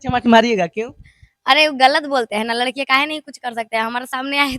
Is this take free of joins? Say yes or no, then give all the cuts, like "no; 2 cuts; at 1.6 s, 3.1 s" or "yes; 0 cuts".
yes; 0 cuts